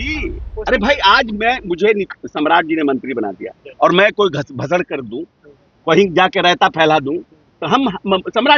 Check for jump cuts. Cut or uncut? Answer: uncut